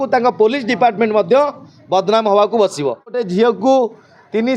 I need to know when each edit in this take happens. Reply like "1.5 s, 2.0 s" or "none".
3.2 s